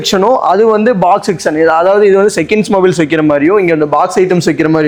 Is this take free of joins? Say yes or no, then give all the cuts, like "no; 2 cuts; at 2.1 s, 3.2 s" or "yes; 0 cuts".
yes; 0 cuts